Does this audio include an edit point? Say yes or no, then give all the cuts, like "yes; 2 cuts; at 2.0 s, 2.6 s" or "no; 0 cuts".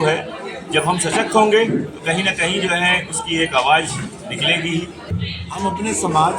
yes; 1 cut; at 5.1 s